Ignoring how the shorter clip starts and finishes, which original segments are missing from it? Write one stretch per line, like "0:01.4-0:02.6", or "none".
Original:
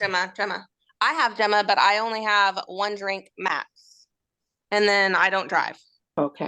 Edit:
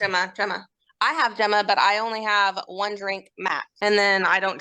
0:03.7-0:04.6